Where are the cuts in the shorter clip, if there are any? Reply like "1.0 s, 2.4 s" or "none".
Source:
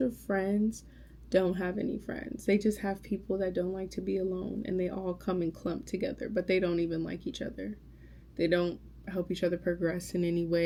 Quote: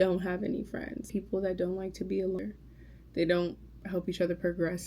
1.0 s, 2.4 s